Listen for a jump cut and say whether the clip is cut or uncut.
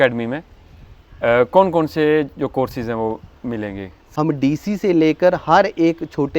cut